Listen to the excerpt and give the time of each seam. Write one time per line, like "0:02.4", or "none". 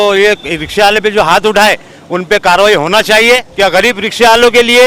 0:03.5